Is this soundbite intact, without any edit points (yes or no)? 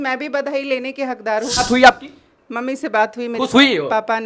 no